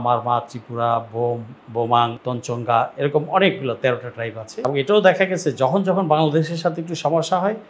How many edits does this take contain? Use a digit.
3